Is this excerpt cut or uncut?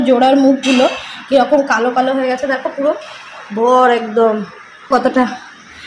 cut